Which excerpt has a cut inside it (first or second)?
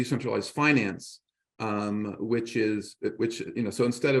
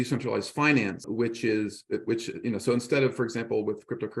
second